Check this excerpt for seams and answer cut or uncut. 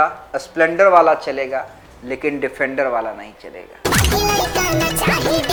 uncut